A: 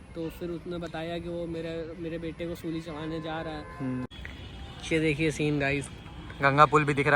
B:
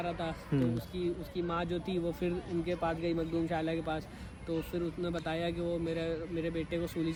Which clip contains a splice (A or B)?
A